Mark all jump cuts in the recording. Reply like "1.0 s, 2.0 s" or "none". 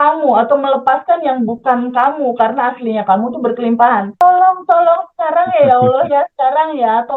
4.2 s

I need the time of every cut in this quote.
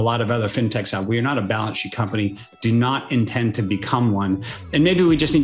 none

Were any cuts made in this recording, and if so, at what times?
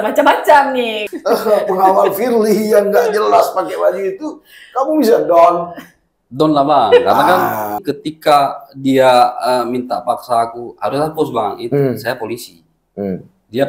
1.0 s, 7.8 s

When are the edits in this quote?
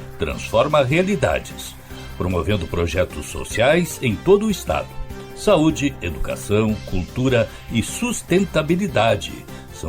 none

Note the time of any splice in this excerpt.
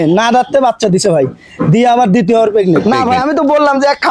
2.8 s

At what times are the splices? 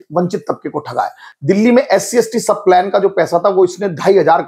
1.3 s

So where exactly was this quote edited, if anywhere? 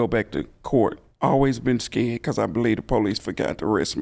1.1 s

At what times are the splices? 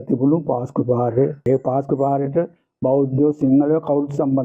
1.4 s

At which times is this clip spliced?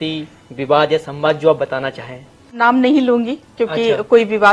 2.5 s

